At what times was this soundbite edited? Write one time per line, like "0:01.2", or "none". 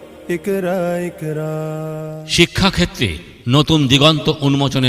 0:01.8

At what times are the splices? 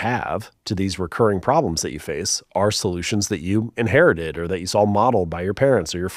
none

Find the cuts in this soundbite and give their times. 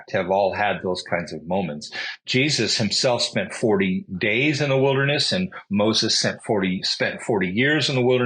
none

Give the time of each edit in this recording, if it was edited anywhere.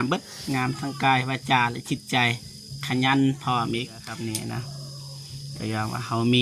0:04.0

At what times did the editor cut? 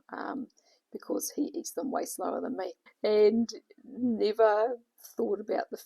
0:02.8

